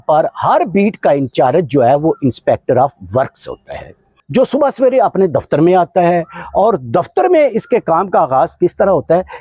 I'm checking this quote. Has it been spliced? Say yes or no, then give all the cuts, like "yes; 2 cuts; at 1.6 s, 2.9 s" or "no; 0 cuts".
no; 0 cuts